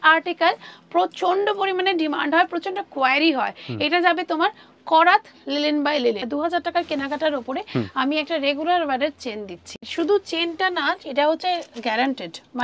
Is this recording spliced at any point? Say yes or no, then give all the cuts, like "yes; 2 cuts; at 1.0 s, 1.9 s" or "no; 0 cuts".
yes; 2 cuts; at 6.2 s, 9.7 s